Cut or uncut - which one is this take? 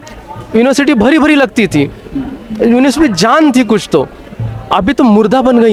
uncut